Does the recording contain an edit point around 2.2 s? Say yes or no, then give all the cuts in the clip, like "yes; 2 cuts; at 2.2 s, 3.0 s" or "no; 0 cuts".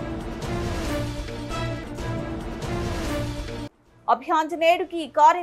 no; 1 cut; at 3.6 s